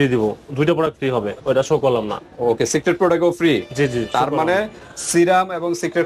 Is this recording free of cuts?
yes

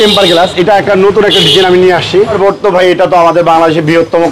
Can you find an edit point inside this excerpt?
yes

